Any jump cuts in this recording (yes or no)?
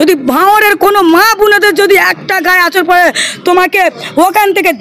no